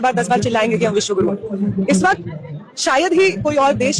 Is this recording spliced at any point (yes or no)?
no